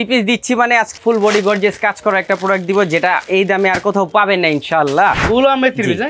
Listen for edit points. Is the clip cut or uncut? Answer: cut